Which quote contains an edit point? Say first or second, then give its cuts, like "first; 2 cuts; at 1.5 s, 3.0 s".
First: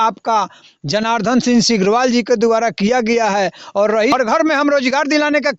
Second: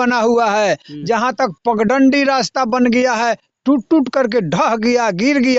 first; 1 cut; at 4.1 s